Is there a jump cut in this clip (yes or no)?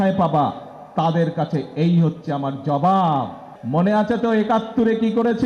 yes